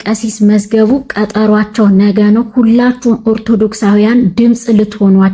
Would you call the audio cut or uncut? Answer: uncut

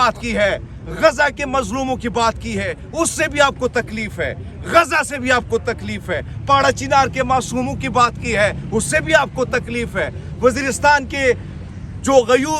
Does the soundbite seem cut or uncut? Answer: uncut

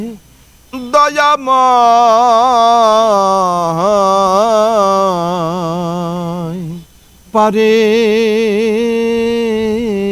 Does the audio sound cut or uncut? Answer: uncut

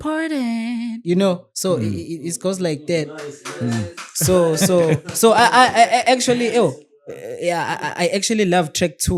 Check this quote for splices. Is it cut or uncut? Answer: uncut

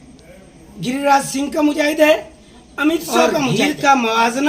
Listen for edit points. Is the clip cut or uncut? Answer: cut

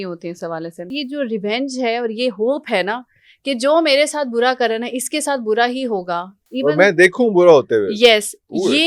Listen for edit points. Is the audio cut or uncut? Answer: cut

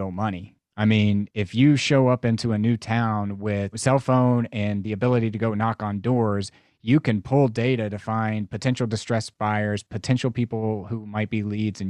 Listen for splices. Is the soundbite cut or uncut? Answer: cut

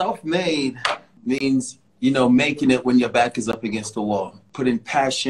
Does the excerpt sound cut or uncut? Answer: cut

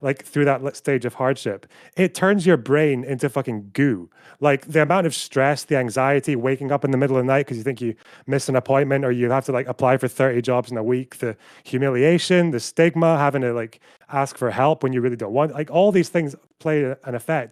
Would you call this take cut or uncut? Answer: uncut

